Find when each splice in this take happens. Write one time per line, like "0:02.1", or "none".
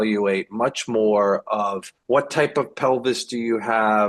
0:01.9